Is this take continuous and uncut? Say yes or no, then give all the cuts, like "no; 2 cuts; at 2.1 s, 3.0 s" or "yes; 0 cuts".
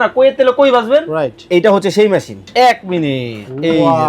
no; 1 cut; at 2.4 s